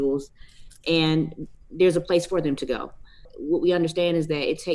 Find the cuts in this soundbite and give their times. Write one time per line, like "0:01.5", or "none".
0:01.4
0:03.3